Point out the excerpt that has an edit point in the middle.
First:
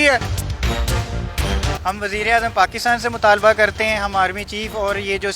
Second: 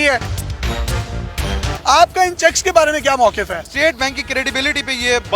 second; 1 cut; at 1.8 s

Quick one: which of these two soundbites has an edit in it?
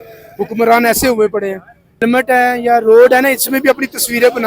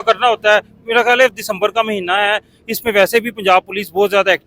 first; 1 cut; at 2.0 s

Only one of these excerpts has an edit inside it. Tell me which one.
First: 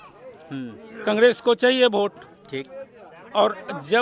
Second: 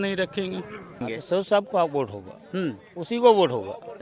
second; 1 cut; at 1.1 s

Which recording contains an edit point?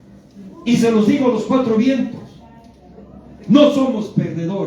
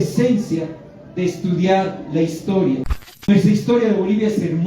second; 1 cut; at 2.9 s

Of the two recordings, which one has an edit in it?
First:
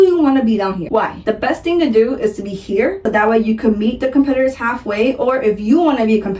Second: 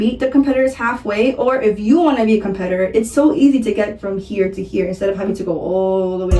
first; 1 cut; at 1.2 s

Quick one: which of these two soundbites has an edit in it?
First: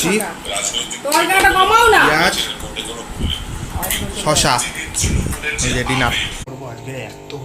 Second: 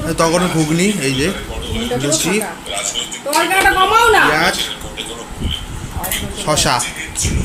first; 1 cut; at 6.4 s

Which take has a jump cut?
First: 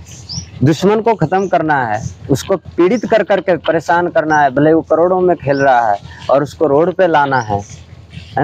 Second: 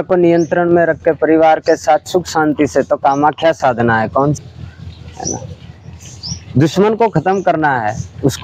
second; 1 cut; at 4.4 s

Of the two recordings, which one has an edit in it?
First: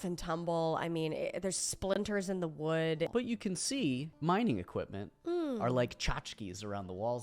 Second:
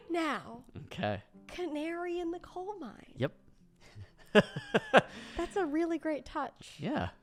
first; 2 cuts; at 3.1 s, 4.1 s

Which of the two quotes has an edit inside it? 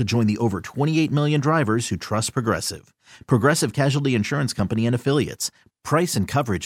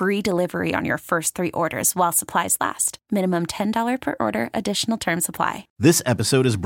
second; 1 cut; at 5.6 s

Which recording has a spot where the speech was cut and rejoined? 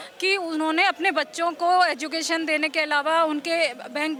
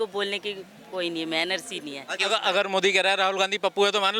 second; 1 cut; at 2.2 s

